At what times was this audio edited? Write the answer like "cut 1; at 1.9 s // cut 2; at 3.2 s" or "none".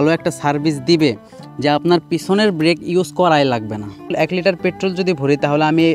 cut 1; at 4.1 s